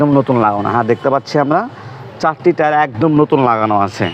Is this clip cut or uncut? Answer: uncut